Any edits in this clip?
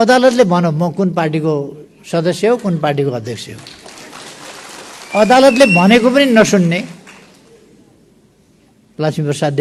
no; 0 cuts

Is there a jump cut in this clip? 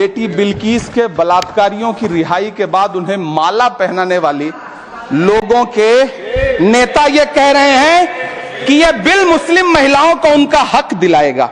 no; 0 cuts

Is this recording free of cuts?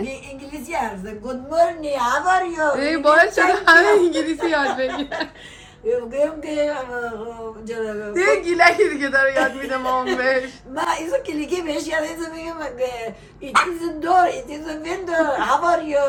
yes; 0 cuts

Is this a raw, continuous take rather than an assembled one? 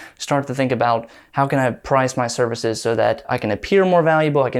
no; 1 cut; at 3.3 s

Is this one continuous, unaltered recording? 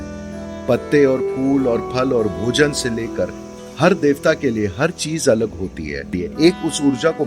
no; 1 cut; at 6.2 s

